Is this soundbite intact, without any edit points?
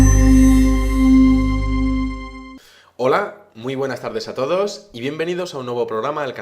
no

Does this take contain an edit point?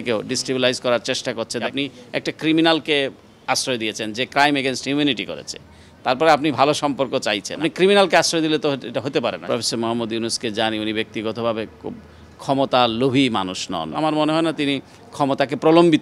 yes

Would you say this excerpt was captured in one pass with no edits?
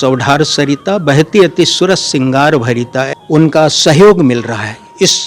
no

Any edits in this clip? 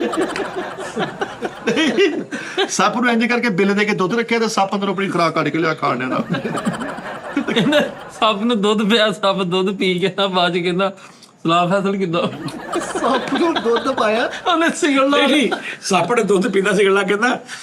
no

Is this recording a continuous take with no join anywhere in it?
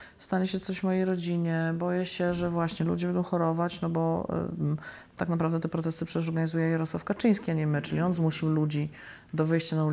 yes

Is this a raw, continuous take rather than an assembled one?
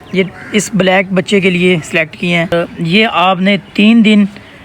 no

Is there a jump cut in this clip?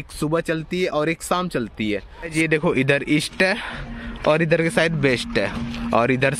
yes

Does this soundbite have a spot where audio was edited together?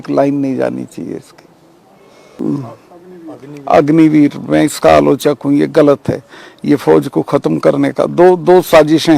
yes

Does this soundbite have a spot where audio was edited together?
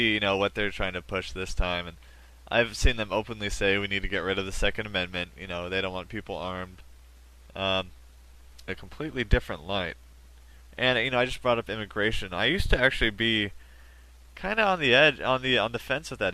no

